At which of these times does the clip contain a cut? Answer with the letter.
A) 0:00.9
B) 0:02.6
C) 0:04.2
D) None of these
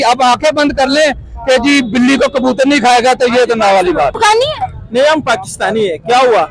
C